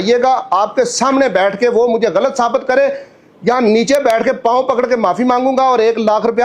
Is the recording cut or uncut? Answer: uncut